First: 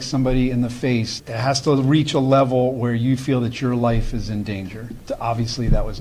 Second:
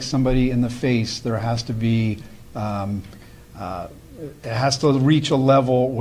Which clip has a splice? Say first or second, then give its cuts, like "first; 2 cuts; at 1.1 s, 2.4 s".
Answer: first; 2 cuts; at 1.1 s, 4.9 s